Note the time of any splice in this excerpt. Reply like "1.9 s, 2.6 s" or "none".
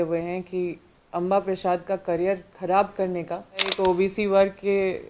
3.7 s